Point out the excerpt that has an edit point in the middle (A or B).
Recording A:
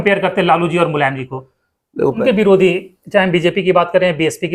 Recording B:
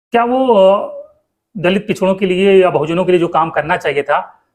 A